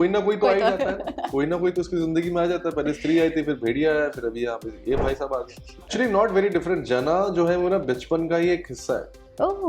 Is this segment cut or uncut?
cut